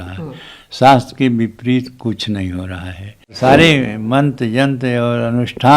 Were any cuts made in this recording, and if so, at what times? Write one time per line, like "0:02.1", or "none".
0:03.3